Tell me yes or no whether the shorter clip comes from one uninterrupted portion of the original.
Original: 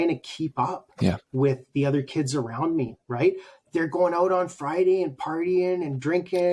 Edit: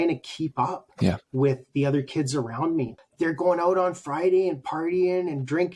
no